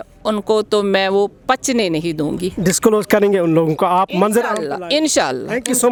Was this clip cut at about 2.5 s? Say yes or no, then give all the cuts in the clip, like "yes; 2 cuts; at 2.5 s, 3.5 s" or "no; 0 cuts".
no; 0 cuts